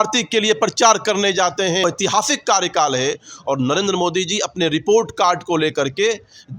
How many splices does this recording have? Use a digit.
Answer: 1